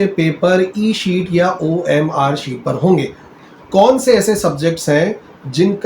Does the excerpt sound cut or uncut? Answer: cut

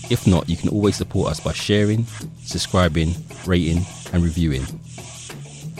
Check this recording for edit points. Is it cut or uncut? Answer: cut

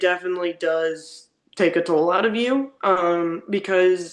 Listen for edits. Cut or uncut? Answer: uncut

